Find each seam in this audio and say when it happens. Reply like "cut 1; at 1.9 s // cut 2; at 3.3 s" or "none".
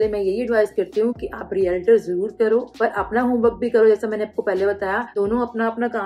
none